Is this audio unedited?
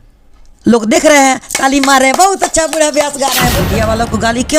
no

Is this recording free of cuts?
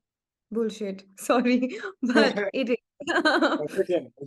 yes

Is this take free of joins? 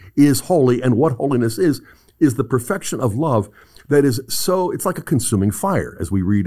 yes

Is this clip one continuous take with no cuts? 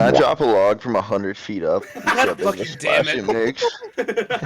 yes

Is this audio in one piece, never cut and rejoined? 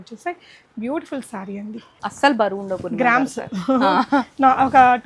no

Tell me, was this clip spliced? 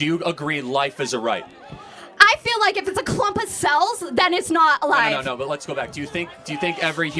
no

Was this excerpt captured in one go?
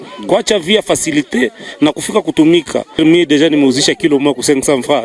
no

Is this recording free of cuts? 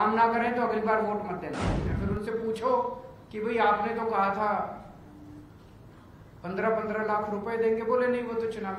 no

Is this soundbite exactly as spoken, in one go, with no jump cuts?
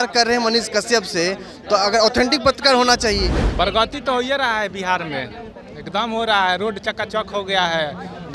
no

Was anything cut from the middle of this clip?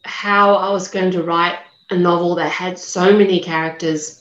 no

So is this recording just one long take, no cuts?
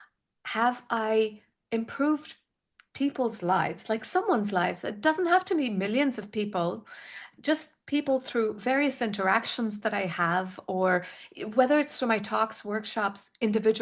yes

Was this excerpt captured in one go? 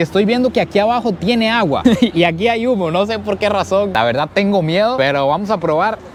yes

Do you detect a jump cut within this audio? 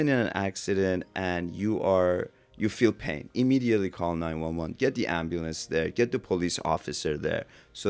no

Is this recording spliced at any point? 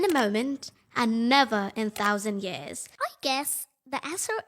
yes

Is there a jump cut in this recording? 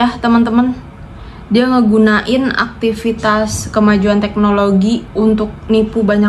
yes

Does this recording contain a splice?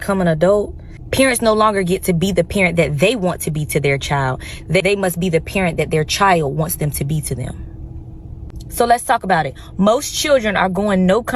yes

